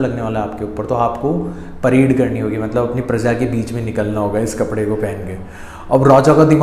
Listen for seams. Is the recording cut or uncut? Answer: uncut